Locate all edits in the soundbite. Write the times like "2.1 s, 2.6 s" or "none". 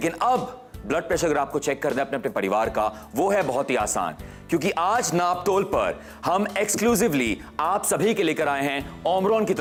none